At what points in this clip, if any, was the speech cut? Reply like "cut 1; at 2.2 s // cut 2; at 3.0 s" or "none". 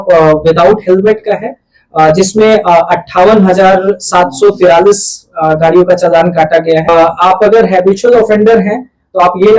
cut 1; at 6.9 s

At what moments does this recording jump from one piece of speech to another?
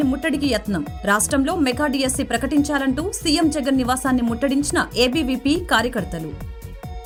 none

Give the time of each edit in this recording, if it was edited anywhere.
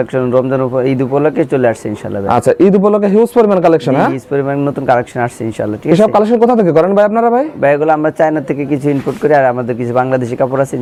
none

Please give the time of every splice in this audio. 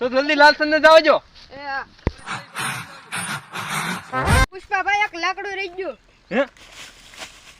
cut 1; at 2.2 s // cut 2; at 4.5 s

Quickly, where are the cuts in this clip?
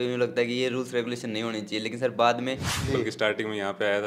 cut 1; at 2.7 s

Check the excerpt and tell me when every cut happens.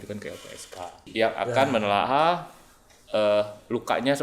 cut 1; at 1.0 s

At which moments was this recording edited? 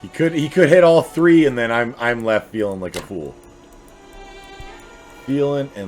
none

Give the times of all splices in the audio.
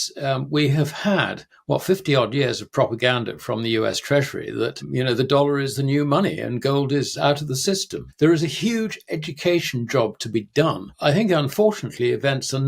cut 1; at 4.8 s // cut 2; at 8.0 s // cut 3; at 10.9 s

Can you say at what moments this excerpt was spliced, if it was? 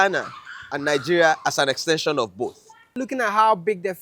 cut 1; at 3.0 s

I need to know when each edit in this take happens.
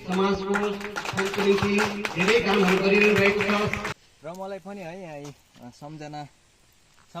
cut 1; at 3.8 s

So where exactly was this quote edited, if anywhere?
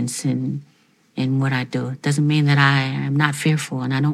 none

